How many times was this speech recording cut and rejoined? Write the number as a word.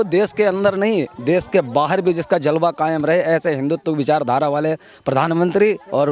zero